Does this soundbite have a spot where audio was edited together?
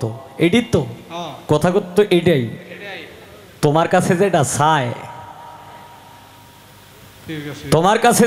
no; 0 cuts

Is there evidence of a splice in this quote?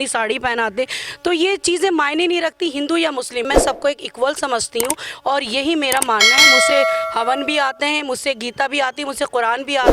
yes; 1 cut; at 3.5 s

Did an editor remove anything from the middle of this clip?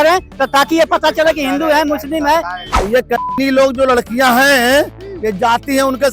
yes; 1 cut; at 2.6 s

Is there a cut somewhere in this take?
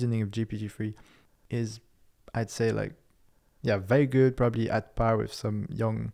no; 0 cuts

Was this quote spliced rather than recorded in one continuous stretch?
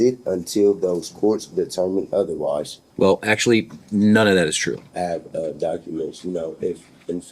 yes; 2 cuts; at 2.8 s, 4.9 s

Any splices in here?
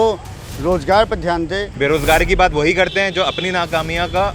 yes; 1 cut; at 1.7 s

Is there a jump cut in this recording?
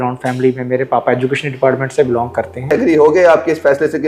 yes; 1 cut; at 2.7 s

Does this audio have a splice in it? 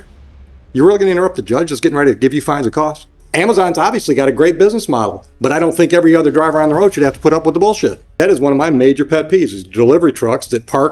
yes; 2 cuts; at 3.2 s, 8.0 s

